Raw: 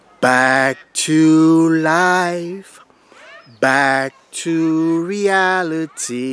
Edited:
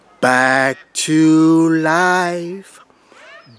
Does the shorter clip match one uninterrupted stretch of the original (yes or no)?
yes